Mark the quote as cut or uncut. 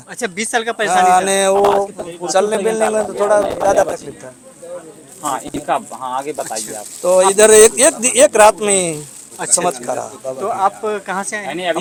uncut